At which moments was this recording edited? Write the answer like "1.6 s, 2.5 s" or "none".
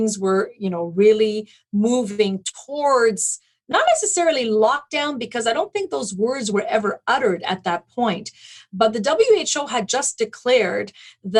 none

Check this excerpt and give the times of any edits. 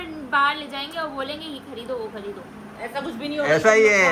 none

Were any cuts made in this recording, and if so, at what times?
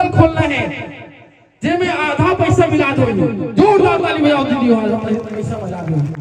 none

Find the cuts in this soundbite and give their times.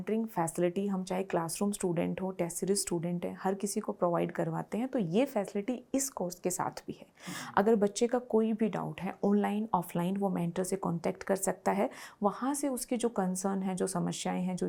none

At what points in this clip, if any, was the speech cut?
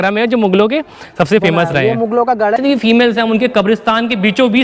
2.6 s

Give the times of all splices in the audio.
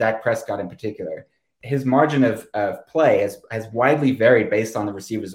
1.5 s

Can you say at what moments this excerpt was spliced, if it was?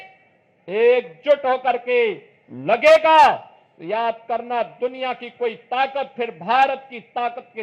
none

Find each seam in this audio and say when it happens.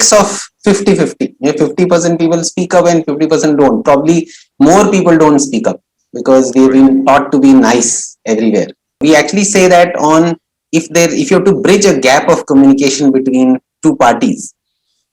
9.0 s

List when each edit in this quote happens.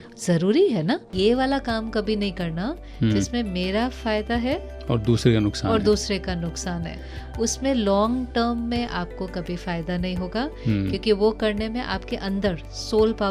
1.1 s, 4.7 s

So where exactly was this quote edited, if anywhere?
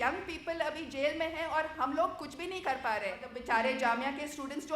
3.3 s

